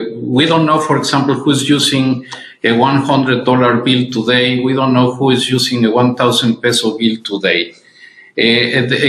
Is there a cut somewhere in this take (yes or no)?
no